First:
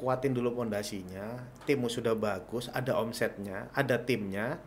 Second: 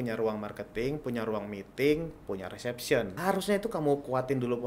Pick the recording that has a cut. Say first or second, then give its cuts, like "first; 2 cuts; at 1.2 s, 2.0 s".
second; 1 cut; at 3.1 s